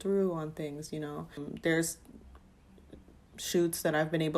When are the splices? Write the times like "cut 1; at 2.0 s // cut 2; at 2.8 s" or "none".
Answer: cut 1; at 1.4 s